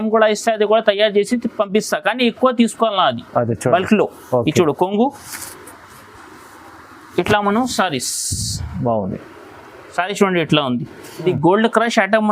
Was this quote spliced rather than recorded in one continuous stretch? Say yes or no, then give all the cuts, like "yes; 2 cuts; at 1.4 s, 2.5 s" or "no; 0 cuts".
yes; 1 cut; at 11.1 s